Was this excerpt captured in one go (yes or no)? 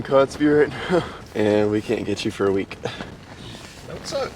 no